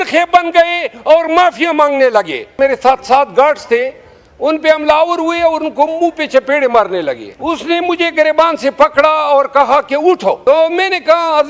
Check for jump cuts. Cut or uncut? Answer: cut